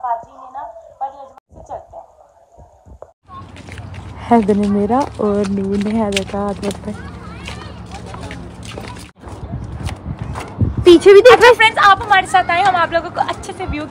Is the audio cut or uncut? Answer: cut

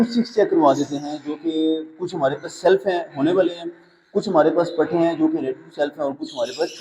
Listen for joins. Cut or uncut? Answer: uncut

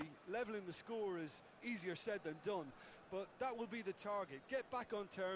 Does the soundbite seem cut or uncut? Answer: uncut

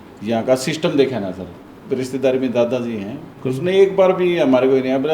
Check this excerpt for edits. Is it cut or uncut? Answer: cut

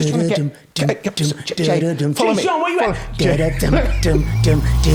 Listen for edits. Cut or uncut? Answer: uncut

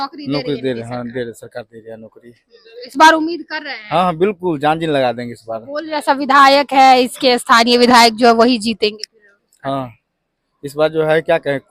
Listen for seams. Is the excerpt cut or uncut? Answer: uncut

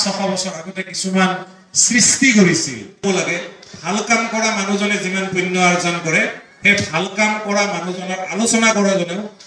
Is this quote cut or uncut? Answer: cut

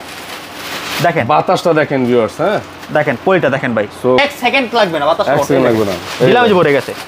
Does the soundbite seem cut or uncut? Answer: cut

